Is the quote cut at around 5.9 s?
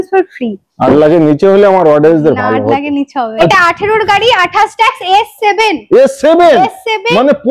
no; 1 cut; at 3.5 s

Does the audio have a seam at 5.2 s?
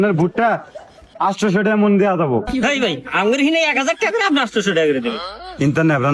yes; 1 cut; at 5.2 s

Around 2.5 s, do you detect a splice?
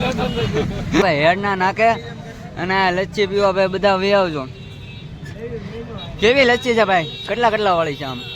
no; 1 cut; at 1.0 s

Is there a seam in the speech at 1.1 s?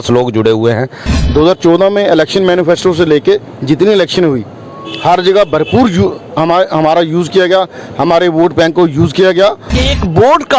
yes; 2 cuts; at 1.1 s, 9.7 s

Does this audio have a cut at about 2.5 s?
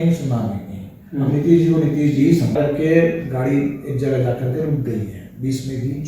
yes; 1 cut; at 2.5 s

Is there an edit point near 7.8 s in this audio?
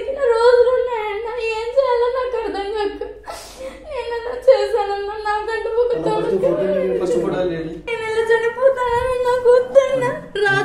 yes; 1 cut; at 7.8 s

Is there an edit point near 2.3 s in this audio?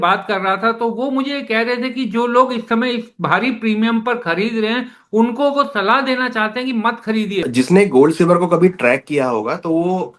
no; 1 cut; at 7.4 s

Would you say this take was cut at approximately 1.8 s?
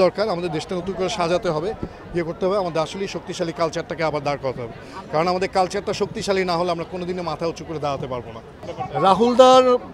no; 0 cuts

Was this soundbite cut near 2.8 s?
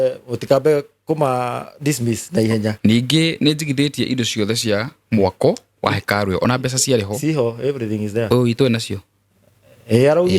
yes; 1 cut; at 2.8 s

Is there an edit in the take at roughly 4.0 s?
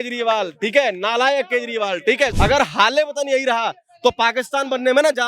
no; 1 cut; at 2.3 s

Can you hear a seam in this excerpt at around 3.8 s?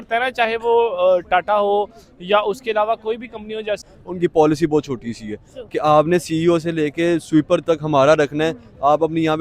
yes; 1 cut; at 3.8 s

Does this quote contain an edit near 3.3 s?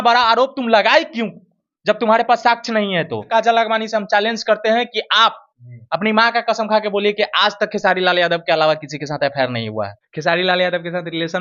yes; 2 cuts; at 3.3 s, 10.0 s

